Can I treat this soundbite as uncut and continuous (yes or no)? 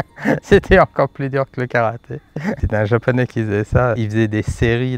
no